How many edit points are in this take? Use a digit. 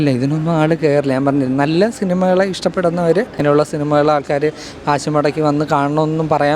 1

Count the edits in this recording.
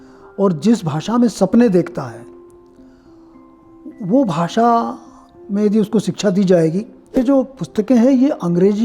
1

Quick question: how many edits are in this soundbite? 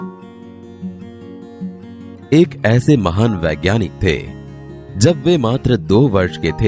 1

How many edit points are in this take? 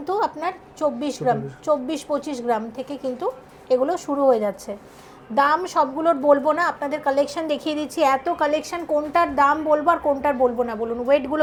0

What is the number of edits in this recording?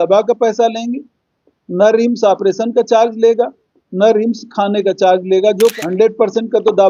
1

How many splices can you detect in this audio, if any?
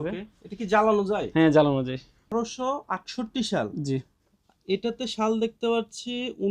1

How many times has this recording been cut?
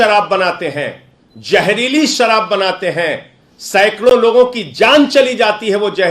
0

